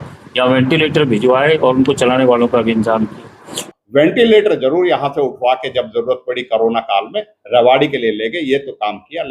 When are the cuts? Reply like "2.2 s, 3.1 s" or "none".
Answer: 3.7 s